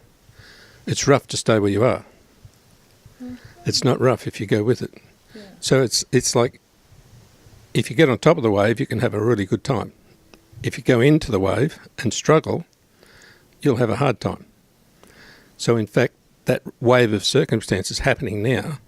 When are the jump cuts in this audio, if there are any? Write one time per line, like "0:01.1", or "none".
0:08.6